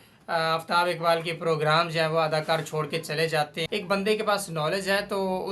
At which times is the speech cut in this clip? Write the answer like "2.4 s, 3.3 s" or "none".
3.6 s